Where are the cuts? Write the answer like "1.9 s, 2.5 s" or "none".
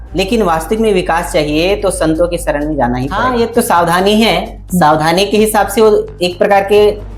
3.1 s